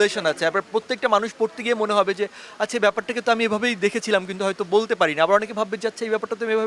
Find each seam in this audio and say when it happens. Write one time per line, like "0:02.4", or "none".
none